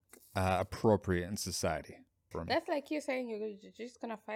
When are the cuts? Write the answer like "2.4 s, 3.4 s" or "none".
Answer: 2.3 s